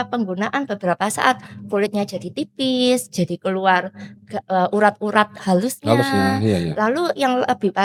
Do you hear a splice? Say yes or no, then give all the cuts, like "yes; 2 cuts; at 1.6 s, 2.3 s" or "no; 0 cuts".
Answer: no; 0 cuts